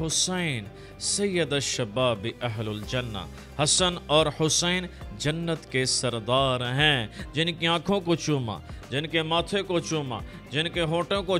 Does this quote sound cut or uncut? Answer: uncut